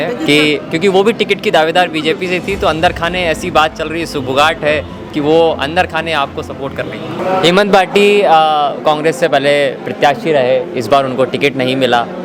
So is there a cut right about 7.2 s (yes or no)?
yes